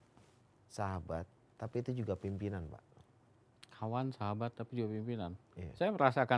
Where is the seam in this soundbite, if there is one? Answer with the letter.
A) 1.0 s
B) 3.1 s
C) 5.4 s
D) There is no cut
D